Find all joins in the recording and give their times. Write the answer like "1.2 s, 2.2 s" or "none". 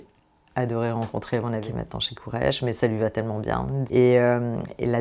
1.6 s, 3.8 s